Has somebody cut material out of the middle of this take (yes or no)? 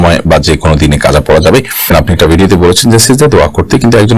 yes